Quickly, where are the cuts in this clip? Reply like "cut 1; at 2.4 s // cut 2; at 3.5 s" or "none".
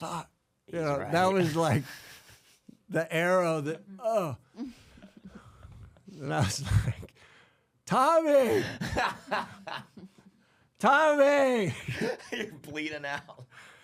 none